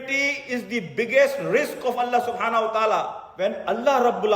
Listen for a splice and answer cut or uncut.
cut